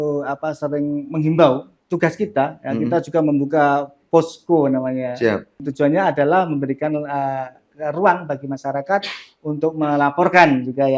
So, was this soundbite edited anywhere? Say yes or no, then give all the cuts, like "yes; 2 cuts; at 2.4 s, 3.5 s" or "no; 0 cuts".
yes; 2 cuts; at 1.7 s, 5.7 s